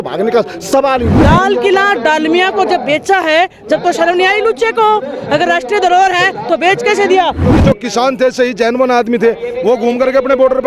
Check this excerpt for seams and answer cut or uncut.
cut